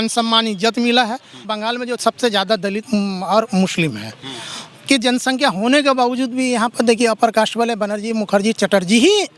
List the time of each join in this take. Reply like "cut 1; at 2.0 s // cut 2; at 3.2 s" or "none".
cut 1; at 1.4 s